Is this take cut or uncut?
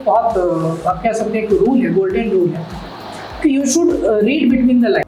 uncut